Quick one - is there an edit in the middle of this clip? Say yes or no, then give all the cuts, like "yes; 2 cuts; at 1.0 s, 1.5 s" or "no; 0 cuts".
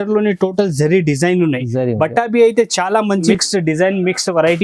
yes; 1 cut; at 3.3 s